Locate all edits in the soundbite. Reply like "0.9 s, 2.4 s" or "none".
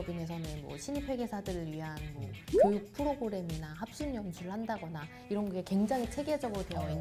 none